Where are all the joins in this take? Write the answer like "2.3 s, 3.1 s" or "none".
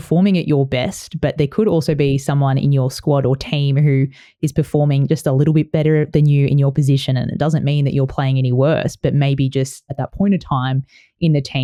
none